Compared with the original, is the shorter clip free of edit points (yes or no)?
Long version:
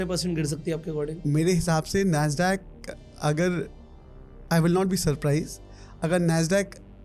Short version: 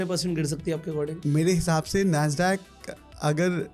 yes